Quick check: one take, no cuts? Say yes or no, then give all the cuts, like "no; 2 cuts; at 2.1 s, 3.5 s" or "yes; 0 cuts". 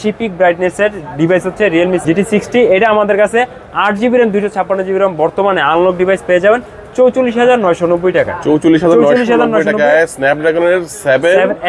yes; 0 cuts